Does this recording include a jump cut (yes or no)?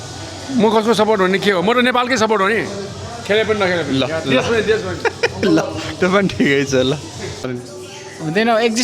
yes